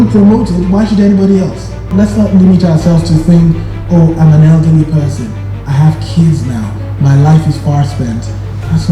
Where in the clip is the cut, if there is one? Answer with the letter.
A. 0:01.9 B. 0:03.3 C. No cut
A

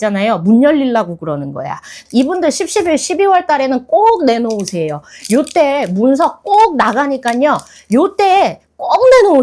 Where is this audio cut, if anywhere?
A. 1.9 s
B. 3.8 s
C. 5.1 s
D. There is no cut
A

